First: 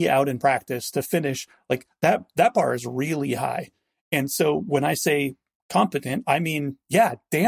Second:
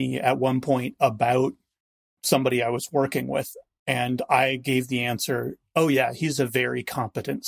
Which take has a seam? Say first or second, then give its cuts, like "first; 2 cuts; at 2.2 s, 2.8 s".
second; 1 cut; at 2.2 s